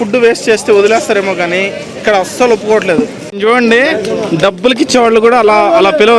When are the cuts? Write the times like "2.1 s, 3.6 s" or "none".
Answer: 3.3 s